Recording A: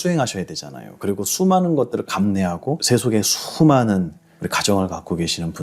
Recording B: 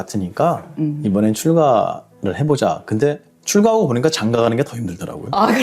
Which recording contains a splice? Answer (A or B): A